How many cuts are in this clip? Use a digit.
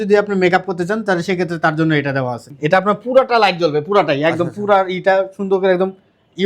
1